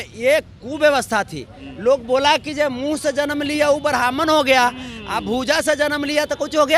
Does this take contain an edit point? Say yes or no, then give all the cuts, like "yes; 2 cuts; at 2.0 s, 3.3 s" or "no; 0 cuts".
no; 0 cuts